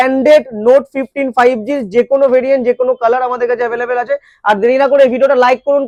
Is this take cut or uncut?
uncut